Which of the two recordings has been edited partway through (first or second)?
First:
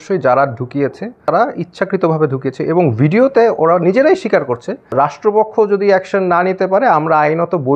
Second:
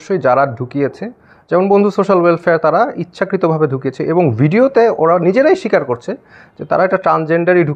first